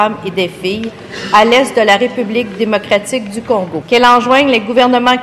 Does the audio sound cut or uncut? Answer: cut